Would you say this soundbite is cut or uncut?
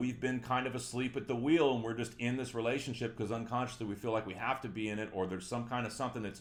uncut